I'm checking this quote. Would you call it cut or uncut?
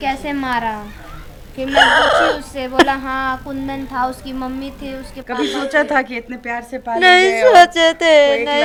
uncut